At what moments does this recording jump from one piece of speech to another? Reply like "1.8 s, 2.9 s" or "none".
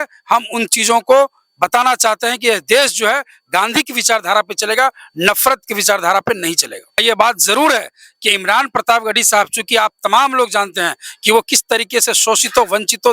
7.0 s